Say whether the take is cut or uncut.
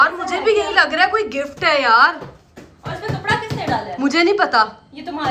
uncut